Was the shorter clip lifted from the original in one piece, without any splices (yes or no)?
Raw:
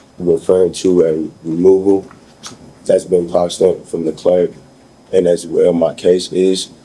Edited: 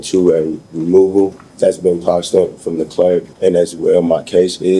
no